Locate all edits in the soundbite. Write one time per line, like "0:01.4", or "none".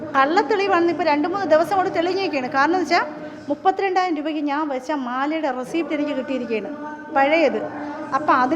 none